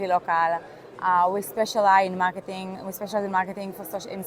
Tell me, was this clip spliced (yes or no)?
no